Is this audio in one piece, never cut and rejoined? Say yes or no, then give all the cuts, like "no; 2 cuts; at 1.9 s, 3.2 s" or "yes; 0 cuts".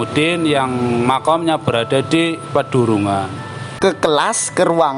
no; 1 cut; at 3.6 s